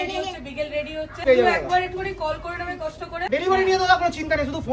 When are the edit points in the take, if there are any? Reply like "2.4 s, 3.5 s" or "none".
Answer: 1.2 s, 3.3 s